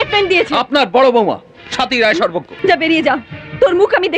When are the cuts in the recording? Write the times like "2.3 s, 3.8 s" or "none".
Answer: 2.5 s